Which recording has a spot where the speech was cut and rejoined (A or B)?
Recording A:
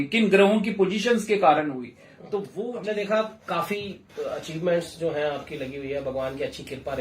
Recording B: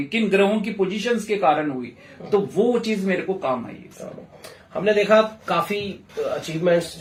A